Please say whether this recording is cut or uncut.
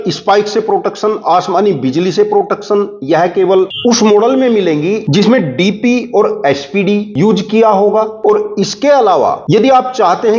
uncut